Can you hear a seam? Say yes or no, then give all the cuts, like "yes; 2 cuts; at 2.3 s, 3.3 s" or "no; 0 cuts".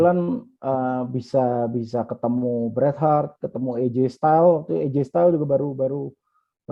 no; 0 cuts